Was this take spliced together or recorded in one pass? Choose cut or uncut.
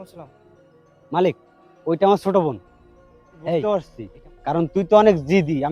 cut